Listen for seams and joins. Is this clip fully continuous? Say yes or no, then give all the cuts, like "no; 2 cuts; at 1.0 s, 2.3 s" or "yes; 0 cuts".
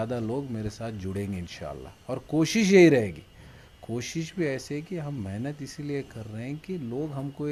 yes; 0 cuts